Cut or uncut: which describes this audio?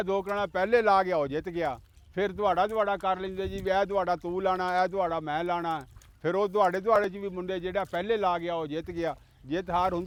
uncut